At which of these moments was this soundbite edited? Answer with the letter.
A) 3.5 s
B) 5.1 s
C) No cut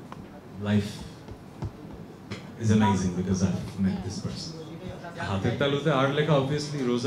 B